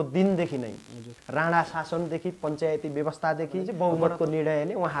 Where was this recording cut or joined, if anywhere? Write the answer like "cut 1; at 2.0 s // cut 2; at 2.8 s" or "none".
cut 1; at 3.7 s